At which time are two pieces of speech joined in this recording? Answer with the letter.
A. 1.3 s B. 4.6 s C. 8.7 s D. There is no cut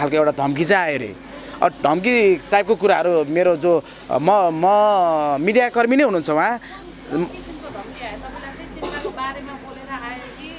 D